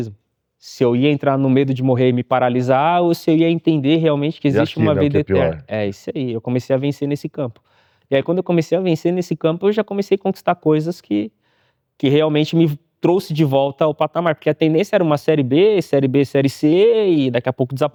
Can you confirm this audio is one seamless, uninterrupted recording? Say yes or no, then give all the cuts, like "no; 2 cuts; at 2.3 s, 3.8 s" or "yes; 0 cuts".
yes; 0 cuts